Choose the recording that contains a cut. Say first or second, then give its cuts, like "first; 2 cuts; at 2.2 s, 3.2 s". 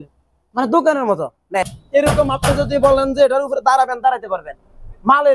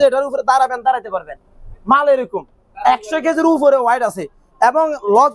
first; 1 cut; at 1.8 s